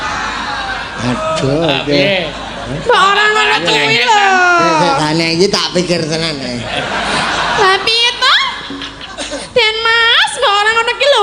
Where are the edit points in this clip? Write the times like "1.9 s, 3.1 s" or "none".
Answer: none